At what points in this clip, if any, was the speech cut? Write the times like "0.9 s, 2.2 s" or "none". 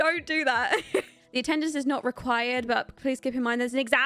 1.2 s